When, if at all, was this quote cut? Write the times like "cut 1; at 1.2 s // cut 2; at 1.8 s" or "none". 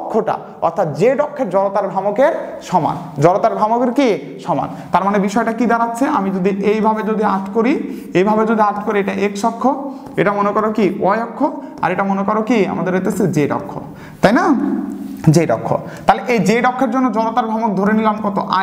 none